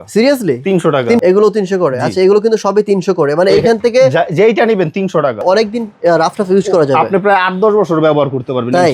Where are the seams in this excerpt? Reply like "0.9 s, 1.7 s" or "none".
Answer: 1.2 s, 5.4 s